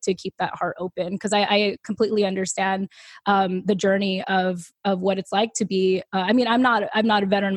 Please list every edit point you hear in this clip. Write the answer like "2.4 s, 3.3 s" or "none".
none